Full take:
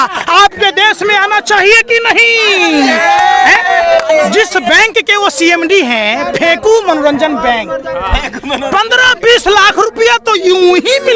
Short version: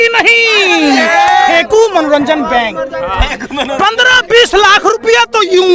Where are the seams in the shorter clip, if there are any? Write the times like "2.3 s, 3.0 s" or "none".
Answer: 1.5 s